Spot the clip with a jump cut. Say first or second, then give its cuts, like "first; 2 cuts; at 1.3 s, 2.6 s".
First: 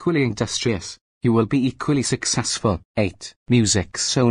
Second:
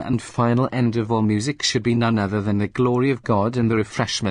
first; 1 cut; at 3.1 s